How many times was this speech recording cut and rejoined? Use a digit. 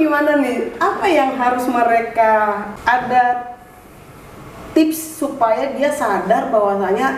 0